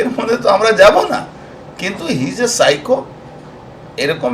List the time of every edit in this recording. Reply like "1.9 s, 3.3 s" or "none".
none